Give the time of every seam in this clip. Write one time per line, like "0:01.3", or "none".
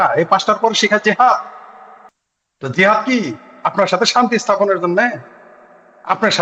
none